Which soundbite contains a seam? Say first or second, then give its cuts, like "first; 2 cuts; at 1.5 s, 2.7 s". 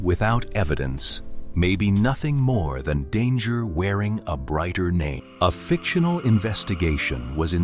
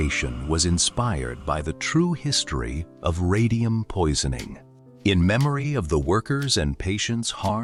first; 1 cut; at 5.2 s